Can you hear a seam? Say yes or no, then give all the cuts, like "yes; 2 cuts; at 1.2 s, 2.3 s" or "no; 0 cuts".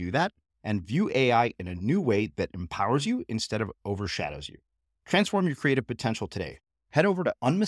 no; 0 cuts